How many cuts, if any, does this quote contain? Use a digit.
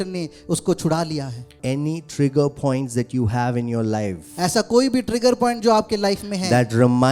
1